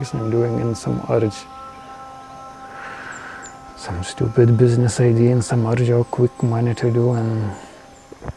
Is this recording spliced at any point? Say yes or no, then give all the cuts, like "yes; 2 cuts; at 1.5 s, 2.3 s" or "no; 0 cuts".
no; 0 cuts